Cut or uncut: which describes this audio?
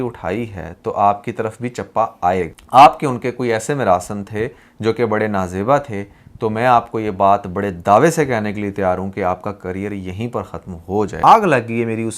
cut